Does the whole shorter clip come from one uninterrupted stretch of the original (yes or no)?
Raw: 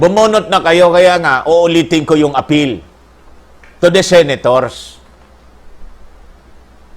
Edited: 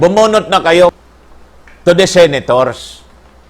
no